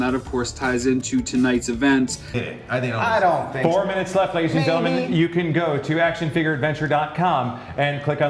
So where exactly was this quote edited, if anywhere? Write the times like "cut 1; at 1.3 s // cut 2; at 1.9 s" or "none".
cut 1; at 2.4 s